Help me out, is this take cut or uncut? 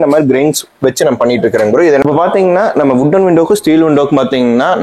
cut